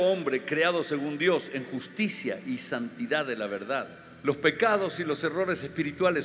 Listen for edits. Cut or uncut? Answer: cut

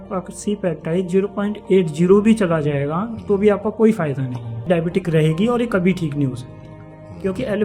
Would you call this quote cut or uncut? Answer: cut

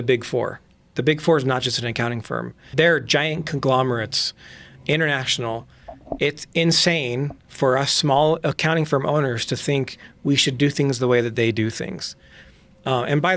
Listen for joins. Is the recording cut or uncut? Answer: cut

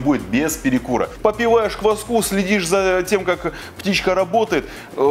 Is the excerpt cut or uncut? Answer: cut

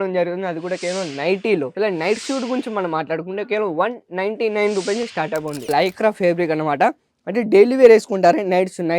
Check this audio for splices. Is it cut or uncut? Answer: cut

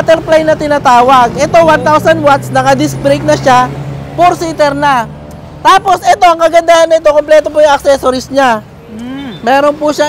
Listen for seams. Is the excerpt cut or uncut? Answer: uncut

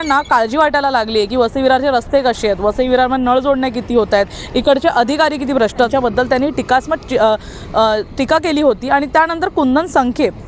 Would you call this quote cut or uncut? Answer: cut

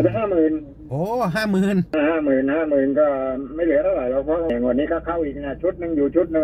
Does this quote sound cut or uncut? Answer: cut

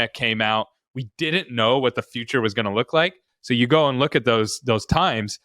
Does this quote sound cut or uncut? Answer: cut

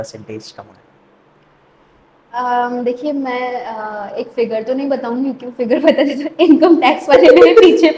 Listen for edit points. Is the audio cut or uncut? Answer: uncut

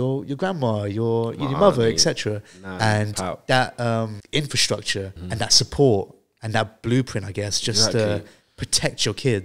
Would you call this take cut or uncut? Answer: cut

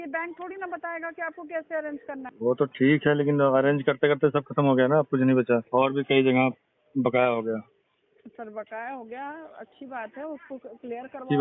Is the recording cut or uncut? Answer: cut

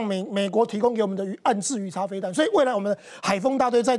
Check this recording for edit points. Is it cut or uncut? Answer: uncut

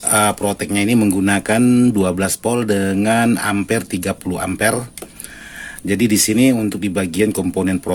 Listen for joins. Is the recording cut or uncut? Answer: uncut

